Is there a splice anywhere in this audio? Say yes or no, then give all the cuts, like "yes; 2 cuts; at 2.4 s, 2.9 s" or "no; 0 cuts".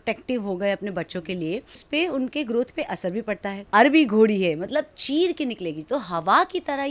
yes; 2 cuts; at 1.8 s, 3.5 s